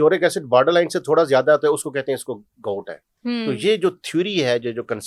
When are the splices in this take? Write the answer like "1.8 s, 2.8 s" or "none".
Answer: none